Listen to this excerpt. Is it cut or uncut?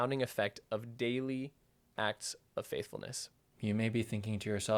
cut